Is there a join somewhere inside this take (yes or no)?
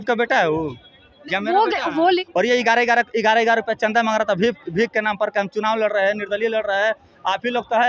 yes